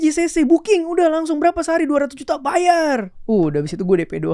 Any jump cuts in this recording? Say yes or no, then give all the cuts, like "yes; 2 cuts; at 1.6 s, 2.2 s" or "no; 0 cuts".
yes; 1 cut; at 3.1 s